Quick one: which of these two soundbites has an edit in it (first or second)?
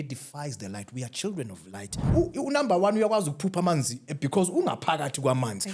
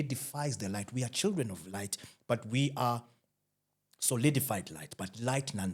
first